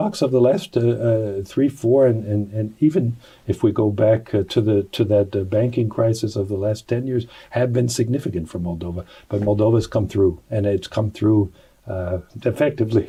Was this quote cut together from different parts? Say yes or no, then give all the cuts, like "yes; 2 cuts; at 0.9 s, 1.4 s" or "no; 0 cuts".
no; 0 cuts